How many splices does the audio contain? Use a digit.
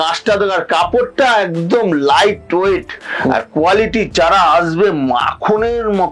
0